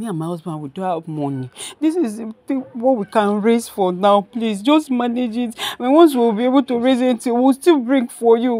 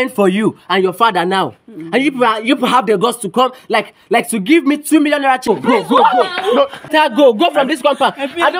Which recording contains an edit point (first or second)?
second